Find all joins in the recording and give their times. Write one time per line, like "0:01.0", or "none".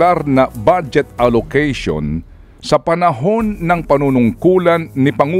none